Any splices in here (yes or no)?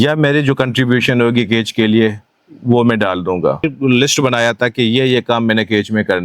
yes